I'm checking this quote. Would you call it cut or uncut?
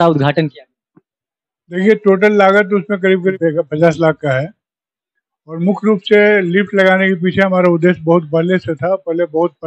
cut